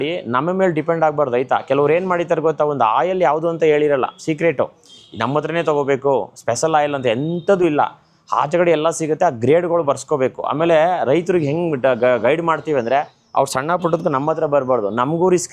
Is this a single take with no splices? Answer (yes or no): yes